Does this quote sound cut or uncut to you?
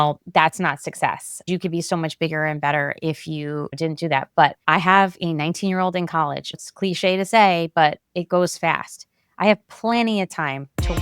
cut